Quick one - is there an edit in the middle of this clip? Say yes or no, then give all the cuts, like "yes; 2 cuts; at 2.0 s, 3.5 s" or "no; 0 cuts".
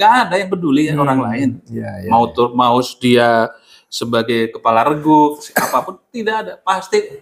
no; 0 cuts